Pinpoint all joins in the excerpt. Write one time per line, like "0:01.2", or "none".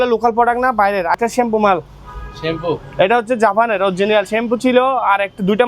0:01.2